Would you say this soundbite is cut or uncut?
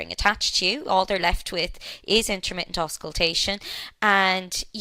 uncut